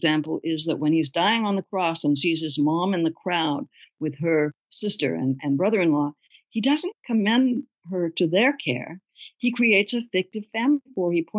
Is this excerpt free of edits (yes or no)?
no